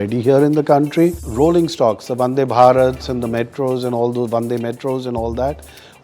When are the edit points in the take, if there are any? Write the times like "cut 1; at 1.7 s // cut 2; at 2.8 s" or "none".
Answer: cut 1; at 1.2 s

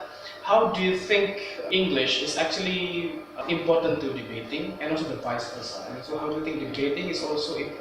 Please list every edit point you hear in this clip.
cut 1; at 1.5 s // cut 2; at 3.4 s

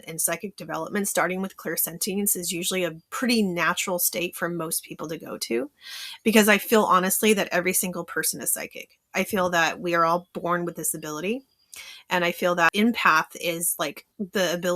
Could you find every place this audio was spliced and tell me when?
cut 1; at 12.7 s

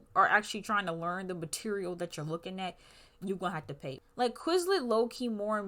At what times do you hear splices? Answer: cut 1; at 4.0 s

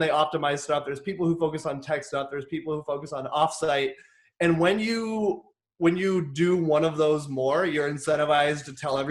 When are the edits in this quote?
none

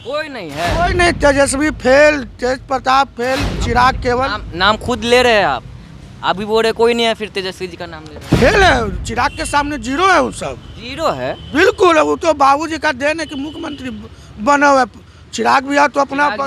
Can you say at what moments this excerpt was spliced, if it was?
none

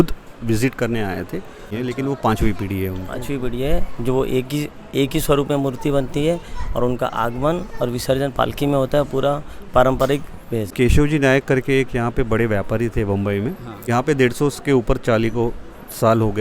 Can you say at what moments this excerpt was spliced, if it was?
cut 1; at 1.7 s // cut 2; at 10.7 s // cut 3; at 13.8 s

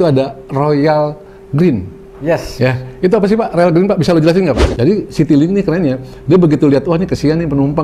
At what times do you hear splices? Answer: cut 1; at 4.6 s

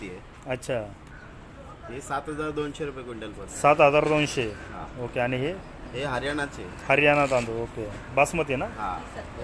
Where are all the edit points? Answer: none

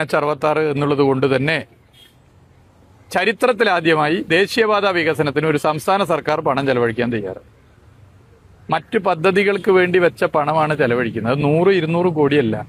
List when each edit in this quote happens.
none

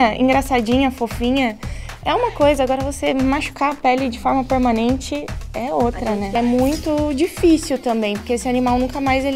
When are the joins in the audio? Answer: cut 1; at 6.4 s

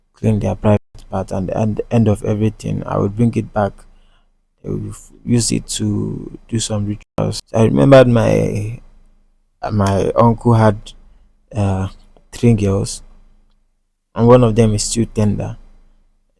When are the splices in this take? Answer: cut 1; at 7.4 s

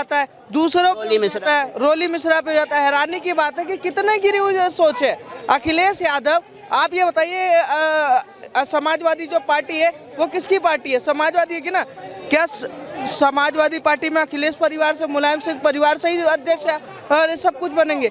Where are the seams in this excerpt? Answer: none

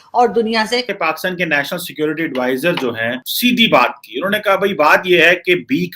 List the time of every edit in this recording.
cut 1; at 0.9 s

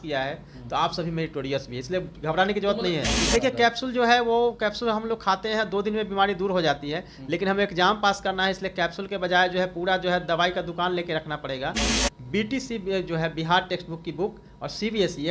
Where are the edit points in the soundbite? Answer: cut 1; at 3.2 s // cut 2; at 11.9 s

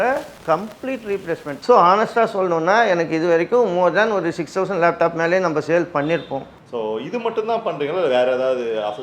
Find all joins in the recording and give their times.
cut 1; at 1.5 s // cut 2; at 6.8 s

